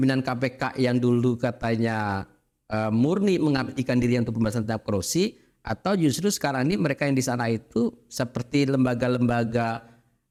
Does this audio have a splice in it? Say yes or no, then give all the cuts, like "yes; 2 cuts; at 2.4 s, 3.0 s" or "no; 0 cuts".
no; 0 cuts